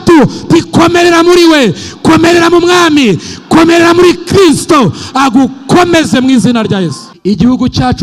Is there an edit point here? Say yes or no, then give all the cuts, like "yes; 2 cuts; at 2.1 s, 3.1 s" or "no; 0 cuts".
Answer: yes; 1 cut; at 7.1 s